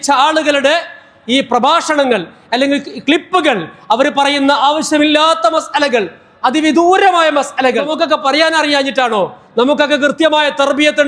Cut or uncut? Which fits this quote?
cut